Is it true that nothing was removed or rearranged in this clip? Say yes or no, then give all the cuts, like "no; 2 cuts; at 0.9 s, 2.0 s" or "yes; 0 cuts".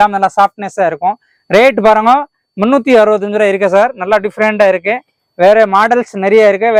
yes; 0 cuts